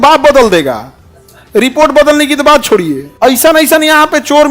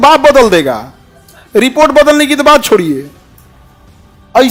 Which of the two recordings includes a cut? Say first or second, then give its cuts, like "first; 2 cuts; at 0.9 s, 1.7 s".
first; 1 cut; at 3.1 s